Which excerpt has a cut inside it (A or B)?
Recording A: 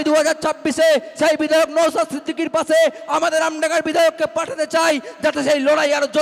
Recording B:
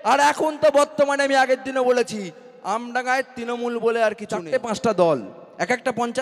B